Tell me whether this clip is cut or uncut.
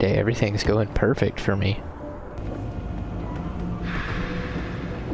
cut